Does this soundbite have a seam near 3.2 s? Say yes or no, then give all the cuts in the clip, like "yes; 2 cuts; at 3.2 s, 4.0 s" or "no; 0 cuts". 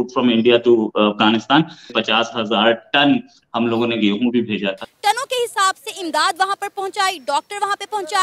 no; 2 cuts; at 2.0 s, 4.9 s